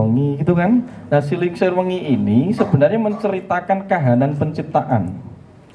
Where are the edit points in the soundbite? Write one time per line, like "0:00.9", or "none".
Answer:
none

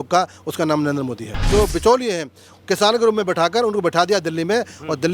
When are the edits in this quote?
0:01.4

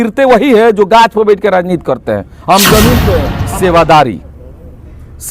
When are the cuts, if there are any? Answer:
0:03.4

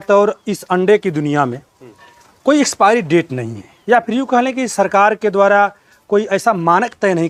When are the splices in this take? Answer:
none

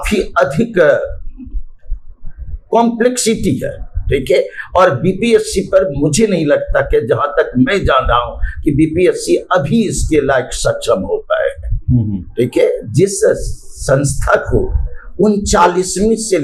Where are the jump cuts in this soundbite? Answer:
none

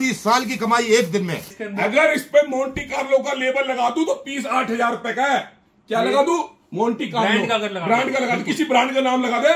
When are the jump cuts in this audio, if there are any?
0:01.5

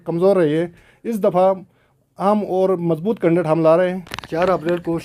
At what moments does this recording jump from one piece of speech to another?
0:04.1

